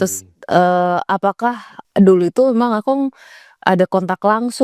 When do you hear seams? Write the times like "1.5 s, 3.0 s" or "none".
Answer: 1.8 s